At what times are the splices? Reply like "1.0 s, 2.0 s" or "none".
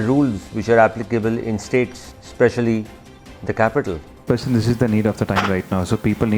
4.2 s